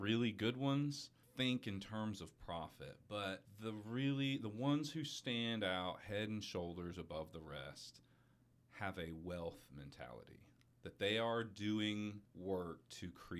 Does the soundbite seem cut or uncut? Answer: uncut